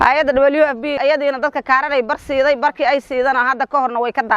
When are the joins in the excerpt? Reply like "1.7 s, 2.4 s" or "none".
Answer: 1.0 s